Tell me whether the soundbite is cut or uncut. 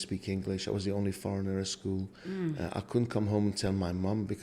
uncut